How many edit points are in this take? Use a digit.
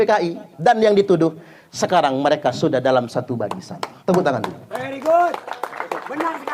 1